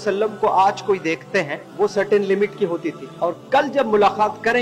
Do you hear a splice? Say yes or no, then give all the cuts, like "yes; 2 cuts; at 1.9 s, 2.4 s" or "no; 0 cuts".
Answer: yes; 2 cuts; at 1.6 s, 3.0 s